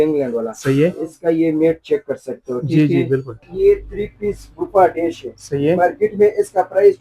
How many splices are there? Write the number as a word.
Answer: one